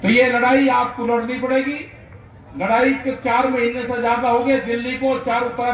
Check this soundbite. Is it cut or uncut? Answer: uncut